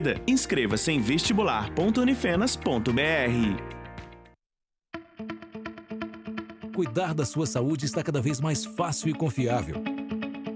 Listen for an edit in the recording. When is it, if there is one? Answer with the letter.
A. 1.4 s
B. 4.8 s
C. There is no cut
B